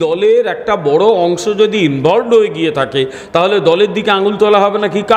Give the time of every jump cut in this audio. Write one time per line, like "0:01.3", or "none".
none